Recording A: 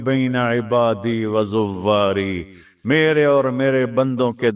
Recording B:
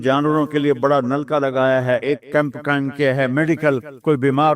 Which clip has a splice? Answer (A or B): B